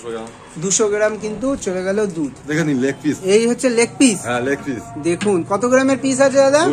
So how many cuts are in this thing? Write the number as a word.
one